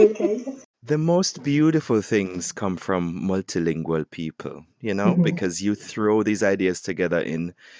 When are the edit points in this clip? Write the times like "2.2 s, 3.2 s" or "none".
none